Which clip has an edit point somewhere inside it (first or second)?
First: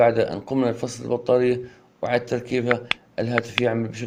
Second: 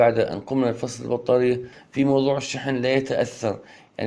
second